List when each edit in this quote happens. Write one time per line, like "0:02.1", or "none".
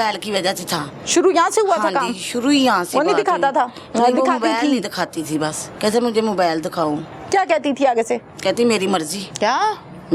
0:05.6
0:09.2